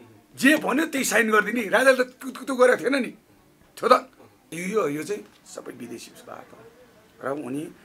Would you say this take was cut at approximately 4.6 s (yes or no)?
yes